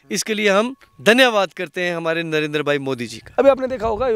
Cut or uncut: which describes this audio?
cut